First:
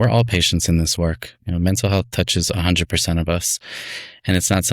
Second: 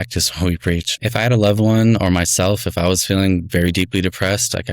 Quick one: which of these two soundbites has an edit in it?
second; 1 cut; at 0.9 s

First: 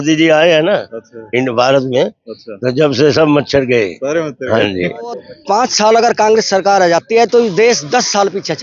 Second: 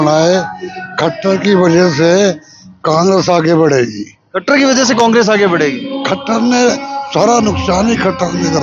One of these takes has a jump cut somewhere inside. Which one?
first; 1 cut; at 5.3 s

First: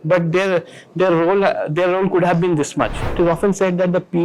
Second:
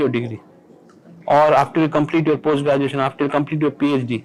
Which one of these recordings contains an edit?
first; 1 cut; at 3.1 s

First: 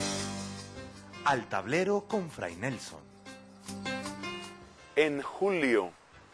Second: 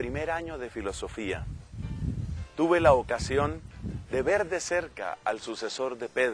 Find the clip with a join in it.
second; 1 cut; at 1.0 s

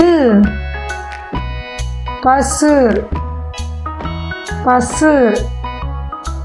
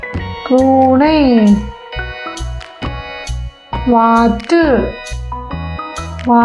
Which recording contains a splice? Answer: first; 3 cuts; at 3.1 s, 4.6 s, 5.7 s

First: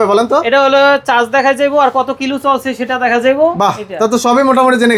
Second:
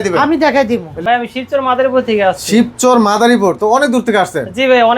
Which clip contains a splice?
second; 1 cut; at 0.9 s

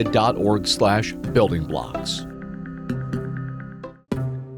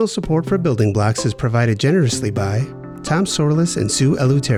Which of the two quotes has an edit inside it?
first; 1 cut; at 3.6 s

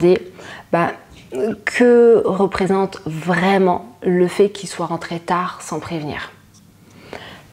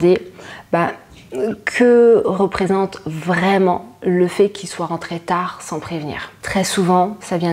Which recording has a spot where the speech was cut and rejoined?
second; 1 cut; at 6.3 s

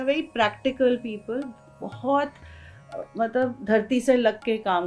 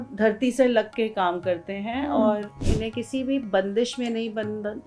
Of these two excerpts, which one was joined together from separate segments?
second; 1 cut; at 2.7 s

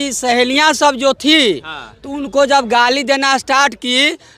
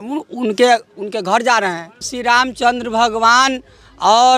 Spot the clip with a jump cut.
second; 1 cut; at 2.1 s

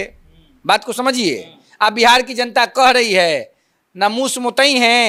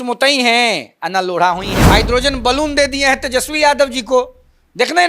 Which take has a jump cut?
second; 1 cut; at 1.8 s

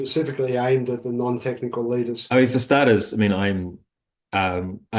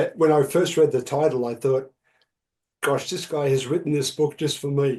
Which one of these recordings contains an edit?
first; 1 cut; at 2.2 s

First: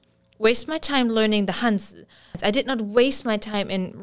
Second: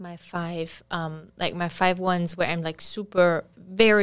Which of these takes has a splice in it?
first; 1 cut; at 2.4 s

